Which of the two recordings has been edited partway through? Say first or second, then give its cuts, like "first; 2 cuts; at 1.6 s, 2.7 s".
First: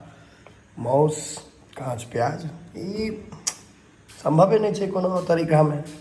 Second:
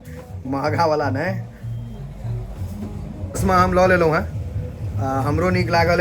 second; 1 cut; at 3.3 s